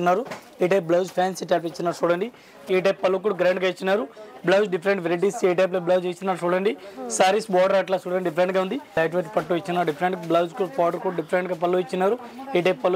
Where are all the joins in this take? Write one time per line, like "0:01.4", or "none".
0:02.6
0:09.0